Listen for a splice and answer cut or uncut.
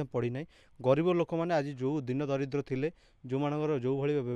uncut